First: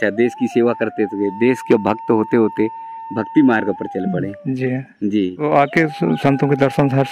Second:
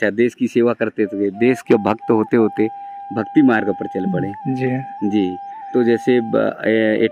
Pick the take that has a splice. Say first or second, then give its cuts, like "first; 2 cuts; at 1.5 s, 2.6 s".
first; 1 cut; at 5.4 s